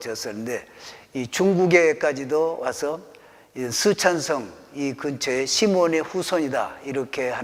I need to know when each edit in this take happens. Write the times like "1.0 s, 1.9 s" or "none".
none